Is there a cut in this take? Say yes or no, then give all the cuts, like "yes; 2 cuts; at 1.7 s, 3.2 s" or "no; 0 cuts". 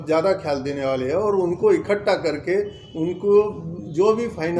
no; 0 cuts